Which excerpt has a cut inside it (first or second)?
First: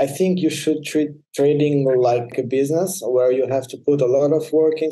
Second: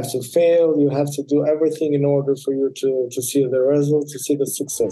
first